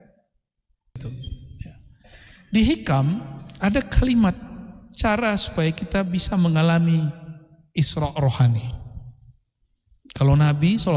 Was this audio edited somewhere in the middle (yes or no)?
yes